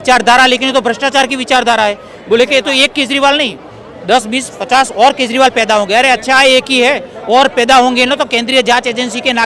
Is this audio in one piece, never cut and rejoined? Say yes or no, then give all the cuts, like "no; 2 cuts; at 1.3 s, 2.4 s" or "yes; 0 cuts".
yes; 0 cuts